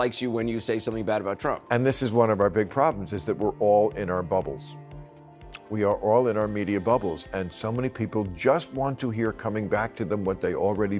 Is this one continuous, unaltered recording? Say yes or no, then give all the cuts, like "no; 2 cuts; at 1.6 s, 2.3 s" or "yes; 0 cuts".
yes; 0 cuts